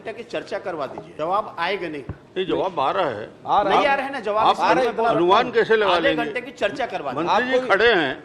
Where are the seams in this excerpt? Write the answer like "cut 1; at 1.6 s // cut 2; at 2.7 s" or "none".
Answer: cut 1; at 1.1 s // cut 2; at 2.1 s